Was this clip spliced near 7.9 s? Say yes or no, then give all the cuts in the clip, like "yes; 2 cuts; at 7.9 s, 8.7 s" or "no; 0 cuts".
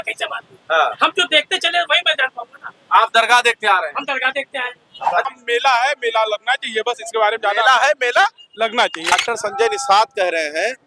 no; 2 cuts; at 5.2 s, 9.1 s